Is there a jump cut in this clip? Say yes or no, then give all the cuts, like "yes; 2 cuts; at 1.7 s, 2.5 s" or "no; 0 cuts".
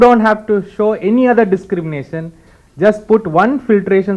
no; 0 cuts